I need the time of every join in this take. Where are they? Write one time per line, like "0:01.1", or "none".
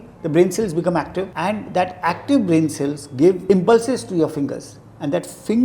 0:01.3
0:03.4